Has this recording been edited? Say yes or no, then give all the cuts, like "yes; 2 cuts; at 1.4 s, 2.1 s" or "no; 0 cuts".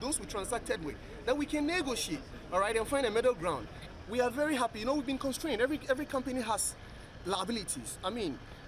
yes; 1 cut; at 3.8 s